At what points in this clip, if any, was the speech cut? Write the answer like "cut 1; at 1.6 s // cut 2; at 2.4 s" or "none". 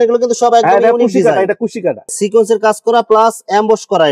cut 1; at 2.1 s